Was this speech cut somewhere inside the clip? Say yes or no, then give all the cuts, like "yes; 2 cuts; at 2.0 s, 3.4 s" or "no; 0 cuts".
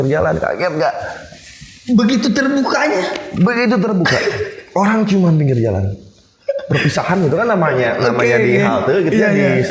no; 0 cuts